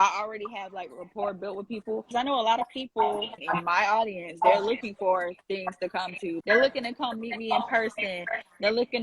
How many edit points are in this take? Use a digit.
3